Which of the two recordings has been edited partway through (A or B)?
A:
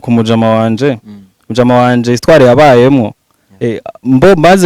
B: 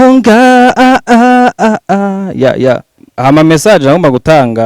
B